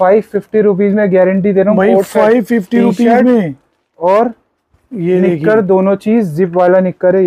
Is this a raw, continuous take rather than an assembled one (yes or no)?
yes